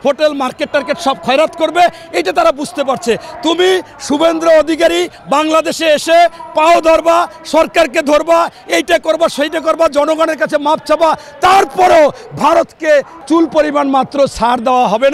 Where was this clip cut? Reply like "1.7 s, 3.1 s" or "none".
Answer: 13.2 s